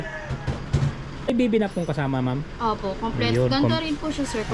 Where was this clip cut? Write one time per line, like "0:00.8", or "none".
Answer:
0:01.3